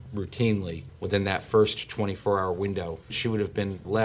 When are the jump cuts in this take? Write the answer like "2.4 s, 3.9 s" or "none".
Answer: 2.9 s

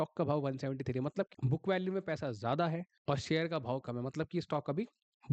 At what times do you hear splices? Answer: 1.4 s, 2.9 s

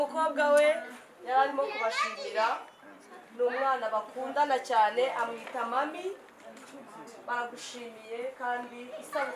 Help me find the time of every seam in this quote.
none

